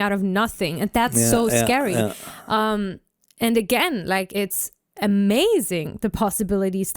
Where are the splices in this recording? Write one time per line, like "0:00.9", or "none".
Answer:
0:04.3